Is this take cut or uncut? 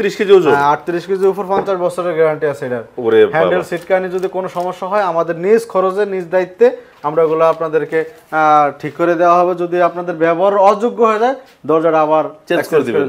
uncut